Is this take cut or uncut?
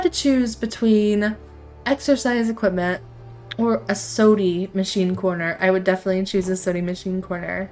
uncut